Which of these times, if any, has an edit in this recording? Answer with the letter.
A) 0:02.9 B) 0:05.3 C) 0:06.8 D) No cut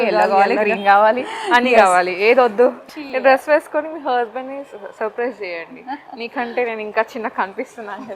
A